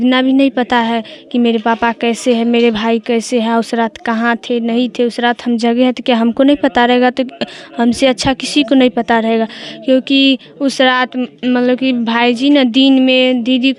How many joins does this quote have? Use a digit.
0